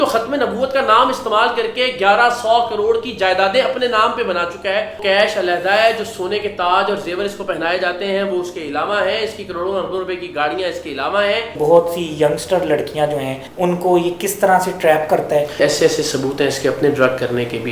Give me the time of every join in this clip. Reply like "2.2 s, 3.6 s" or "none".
5.0 s, 11.5 s, 13.4 s, 15.6 s